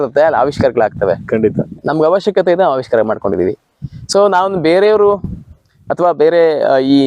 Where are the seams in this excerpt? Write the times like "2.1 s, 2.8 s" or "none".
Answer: none